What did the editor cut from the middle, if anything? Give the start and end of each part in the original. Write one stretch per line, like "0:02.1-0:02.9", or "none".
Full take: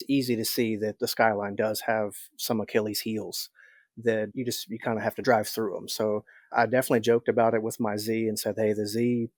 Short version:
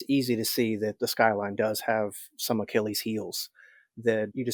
none